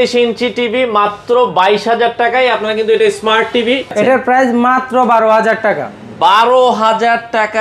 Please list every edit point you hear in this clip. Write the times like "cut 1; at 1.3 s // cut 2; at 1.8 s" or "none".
cut 1; at 3.9 s